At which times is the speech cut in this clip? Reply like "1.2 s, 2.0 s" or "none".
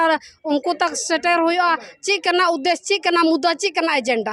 none

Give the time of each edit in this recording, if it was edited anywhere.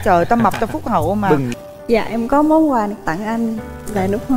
1.5 s

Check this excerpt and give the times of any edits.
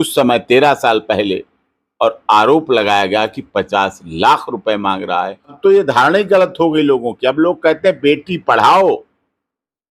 5.5 s

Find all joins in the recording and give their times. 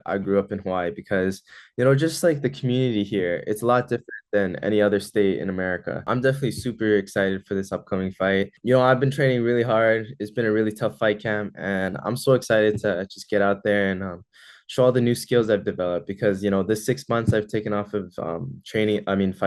6.1 s, 8.6 s

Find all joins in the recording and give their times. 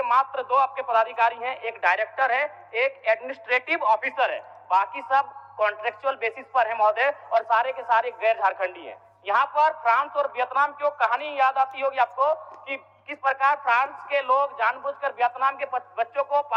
none

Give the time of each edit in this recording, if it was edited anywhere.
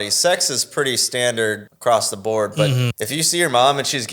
1.7 s, 3.0 s

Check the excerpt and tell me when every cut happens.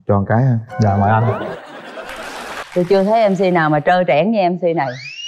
2.6 s

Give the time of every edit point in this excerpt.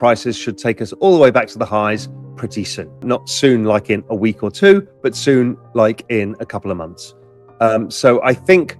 3.0 s

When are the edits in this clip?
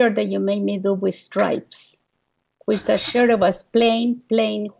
none

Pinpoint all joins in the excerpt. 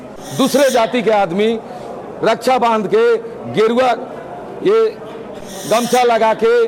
none

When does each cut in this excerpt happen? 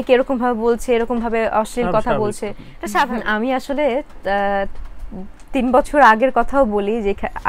3.1 s

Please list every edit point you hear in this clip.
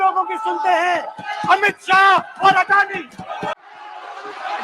3.5 s

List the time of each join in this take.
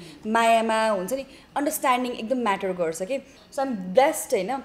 3.4 s

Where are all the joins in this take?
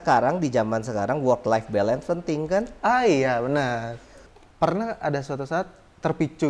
4.2 s

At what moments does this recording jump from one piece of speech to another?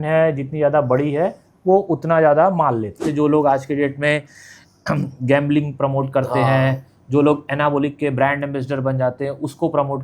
3.0 s

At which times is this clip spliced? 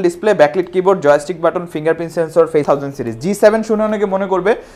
2.6 s

